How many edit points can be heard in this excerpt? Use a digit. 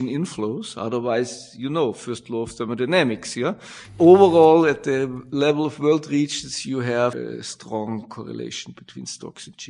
2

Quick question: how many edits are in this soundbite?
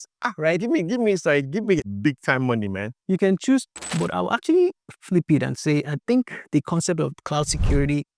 1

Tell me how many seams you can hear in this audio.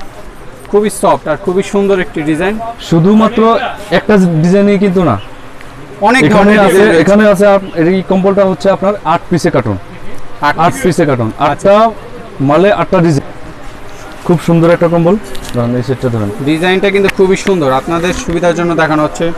1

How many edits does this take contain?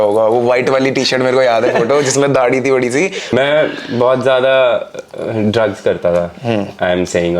1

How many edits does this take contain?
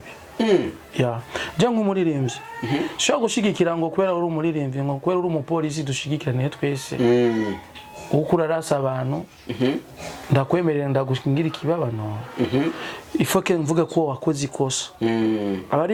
0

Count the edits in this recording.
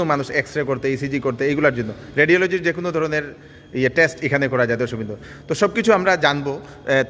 0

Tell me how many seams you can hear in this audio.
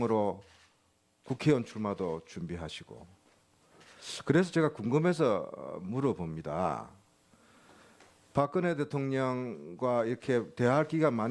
1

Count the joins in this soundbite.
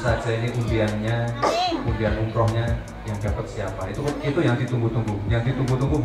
0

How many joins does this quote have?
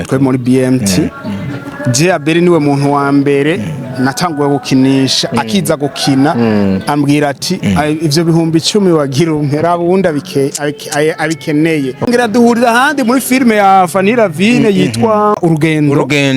2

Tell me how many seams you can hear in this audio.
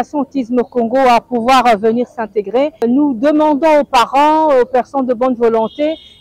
1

